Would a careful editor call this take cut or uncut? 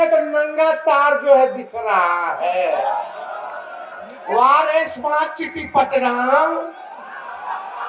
uncut